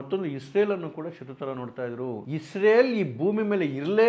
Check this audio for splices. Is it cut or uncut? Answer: cut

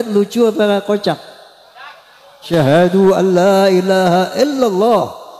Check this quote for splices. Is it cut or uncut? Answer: cut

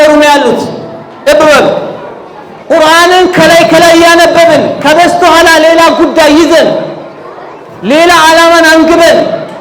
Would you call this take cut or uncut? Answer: cut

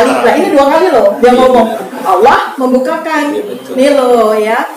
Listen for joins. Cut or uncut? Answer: cut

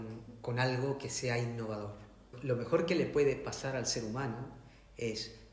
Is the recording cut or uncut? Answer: cut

